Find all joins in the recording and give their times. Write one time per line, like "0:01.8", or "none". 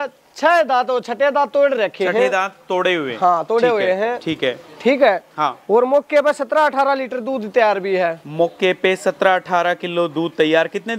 none